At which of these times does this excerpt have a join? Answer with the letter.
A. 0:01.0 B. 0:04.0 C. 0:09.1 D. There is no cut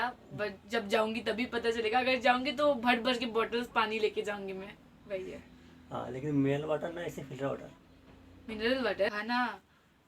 C